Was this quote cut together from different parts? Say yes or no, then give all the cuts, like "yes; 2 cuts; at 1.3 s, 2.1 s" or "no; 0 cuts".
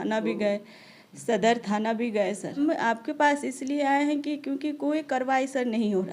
yes; 1 cut; at 2.6 s